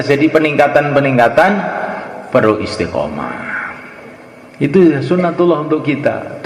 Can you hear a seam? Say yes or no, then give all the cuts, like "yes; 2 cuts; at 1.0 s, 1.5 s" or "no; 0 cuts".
yes; 1 cut; at 4.4 s